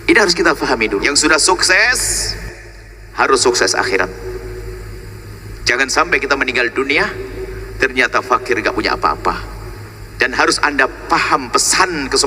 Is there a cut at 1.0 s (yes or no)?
yes